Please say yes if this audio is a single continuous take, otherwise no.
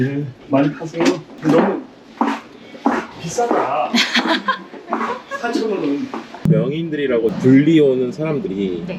no